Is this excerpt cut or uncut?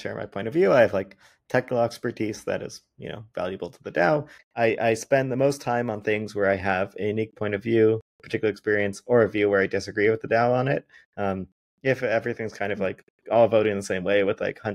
cut